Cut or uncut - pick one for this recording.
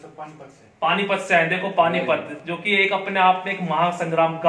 uncut